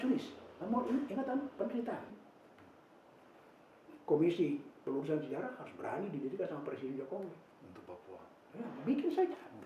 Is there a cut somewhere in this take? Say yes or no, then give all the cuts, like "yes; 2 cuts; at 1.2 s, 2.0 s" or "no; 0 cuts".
yes; 1 cut; at 2.2 s